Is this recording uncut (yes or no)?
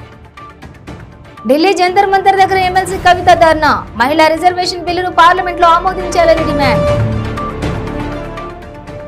yes